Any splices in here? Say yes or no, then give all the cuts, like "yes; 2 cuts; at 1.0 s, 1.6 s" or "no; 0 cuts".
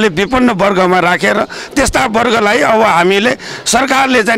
no; 0 cuts